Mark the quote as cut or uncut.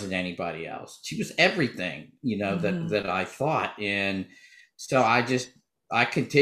uncut